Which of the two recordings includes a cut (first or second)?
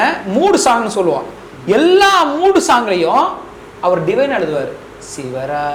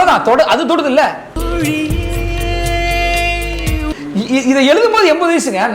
second